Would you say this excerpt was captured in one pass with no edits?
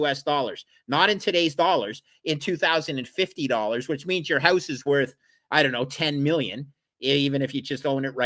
yes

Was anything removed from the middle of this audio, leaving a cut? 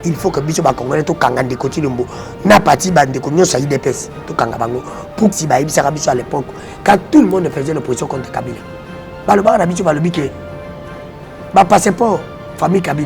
yes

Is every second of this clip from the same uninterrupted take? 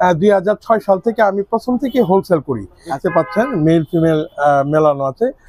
no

